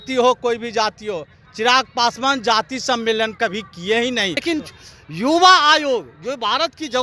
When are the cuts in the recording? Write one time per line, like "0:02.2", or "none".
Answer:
0:04.4